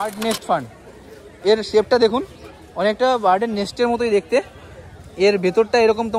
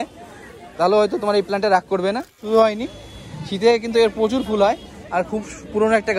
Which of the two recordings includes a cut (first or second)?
second